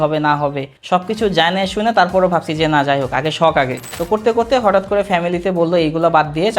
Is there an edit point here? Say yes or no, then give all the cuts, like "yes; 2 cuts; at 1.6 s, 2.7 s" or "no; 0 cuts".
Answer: yes; 1 cut; at 3.9 s